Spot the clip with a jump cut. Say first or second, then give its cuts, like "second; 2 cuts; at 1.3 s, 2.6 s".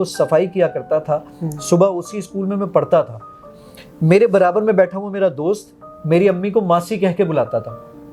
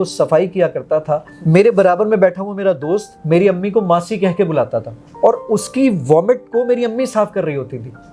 second; 3 cuts; at 1.3 s, 3.1 s, 5.0 s